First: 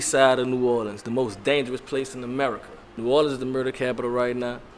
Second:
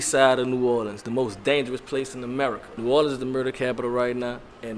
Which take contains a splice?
second; 1 cut; at 2.7 s

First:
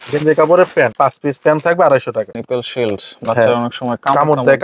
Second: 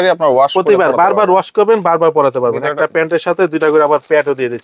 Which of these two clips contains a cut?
first; 2 cuts; at 0.9 s, 2.3 s

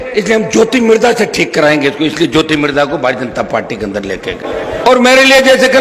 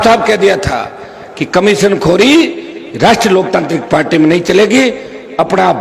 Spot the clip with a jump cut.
first; 1 cut; at 4.4 s

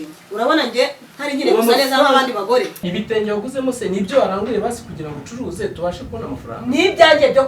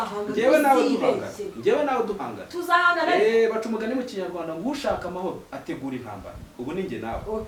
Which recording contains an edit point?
first; 1 cut; at 2.9 s

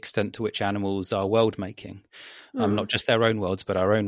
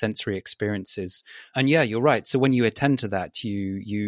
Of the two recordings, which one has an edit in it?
second; 1 cut; at 1.5 s

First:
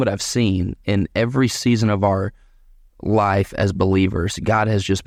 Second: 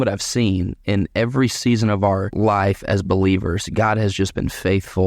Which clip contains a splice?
second; 1 cut; at 2.3 s

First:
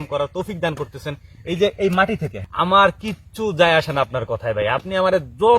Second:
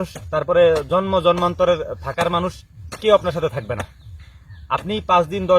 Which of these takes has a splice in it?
first; 1 cut; at 2.3 s

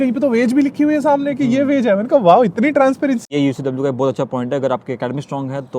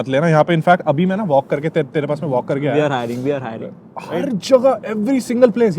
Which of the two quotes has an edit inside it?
first; 1 cut; at 3.3 s

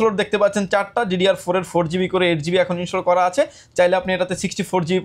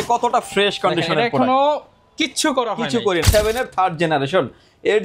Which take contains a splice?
second; 1 cut; at 3.3 s

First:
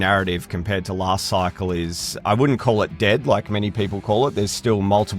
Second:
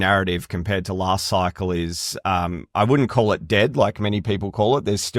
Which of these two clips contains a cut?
first; 1 cut; at 2.1 s

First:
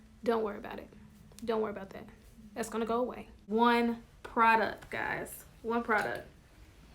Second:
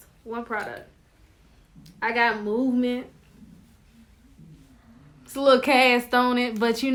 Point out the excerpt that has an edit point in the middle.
first; 1 cut; at 3.4 s

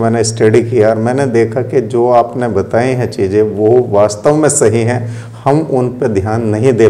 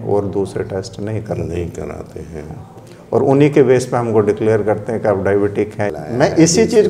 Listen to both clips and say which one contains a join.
second; 1 cut; at 5.9 s

